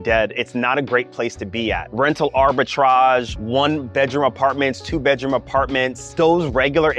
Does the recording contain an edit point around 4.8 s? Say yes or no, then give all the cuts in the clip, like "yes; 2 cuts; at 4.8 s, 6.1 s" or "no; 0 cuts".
no; 3 cuts; at 1.8 s, 3.4 s, 6.1 s